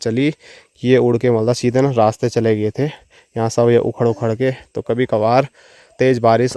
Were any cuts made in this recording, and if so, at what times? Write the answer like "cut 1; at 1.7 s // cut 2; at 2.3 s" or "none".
none